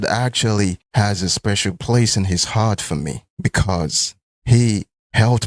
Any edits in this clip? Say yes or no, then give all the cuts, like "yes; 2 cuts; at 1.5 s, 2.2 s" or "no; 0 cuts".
no; 0 cuts